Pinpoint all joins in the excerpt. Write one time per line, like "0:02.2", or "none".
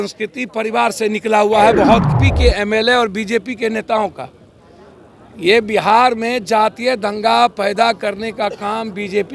0:02.2